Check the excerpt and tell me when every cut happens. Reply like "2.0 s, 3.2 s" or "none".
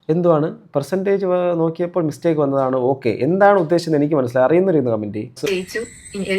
5.4 s